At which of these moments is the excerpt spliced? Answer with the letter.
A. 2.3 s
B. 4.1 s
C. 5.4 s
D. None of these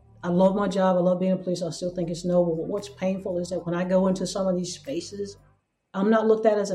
C